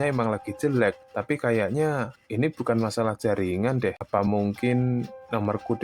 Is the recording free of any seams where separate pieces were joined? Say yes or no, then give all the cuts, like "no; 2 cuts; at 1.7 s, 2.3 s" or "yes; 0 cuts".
no; 1 cut; at 4.0 s